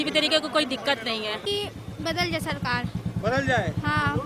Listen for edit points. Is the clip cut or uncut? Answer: cut